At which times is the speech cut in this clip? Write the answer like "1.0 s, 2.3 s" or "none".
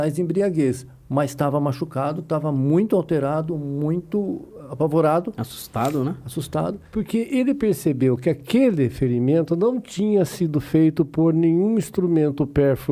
6.8 s